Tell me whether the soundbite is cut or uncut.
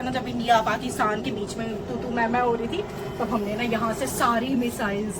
uncut